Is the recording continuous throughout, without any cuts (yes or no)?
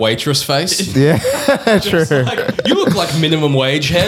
yes